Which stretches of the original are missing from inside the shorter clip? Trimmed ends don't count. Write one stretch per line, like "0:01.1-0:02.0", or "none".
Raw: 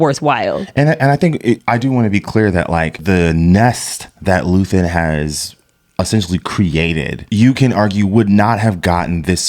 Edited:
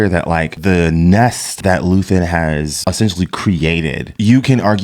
0:03.9-0:04.1
0:05.4-0:05.9